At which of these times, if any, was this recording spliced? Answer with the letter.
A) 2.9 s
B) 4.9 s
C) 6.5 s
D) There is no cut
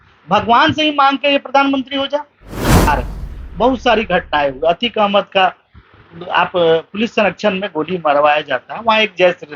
A